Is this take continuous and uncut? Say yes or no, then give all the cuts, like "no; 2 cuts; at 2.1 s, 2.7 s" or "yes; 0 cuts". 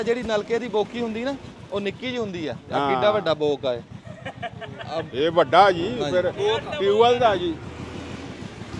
yes; 0 cuts